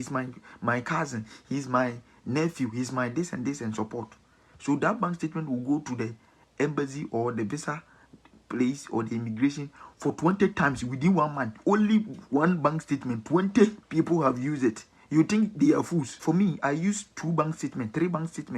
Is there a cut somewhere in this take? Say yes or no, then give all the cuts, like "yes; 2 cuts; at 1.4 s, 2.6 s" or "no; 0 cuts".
yes; 1 cut; at 16.1 s